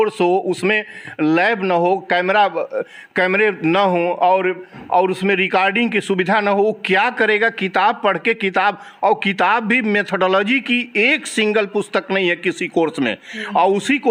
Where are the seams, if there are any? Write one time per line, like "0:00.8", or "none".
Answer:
none